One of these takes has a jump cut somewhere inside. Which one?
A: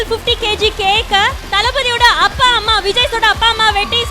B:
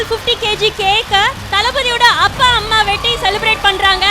B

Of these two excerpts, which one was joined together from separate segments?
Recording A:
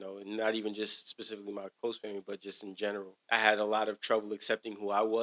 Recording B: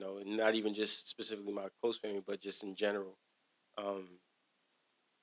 A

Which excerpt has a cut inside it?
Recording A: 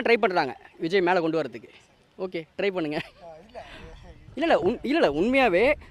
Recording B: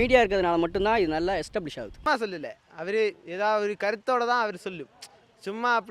B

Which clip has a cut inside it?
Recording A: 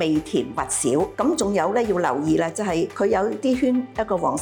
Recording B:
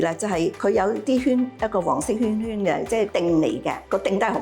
B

